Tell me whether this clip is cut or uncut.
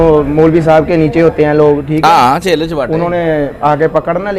uncut